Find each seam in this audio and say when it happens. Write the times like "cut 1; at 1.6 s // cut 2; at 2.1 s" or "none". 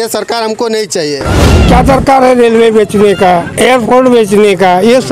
cut 1; at 1.4 s // cut 2; at 3.5 s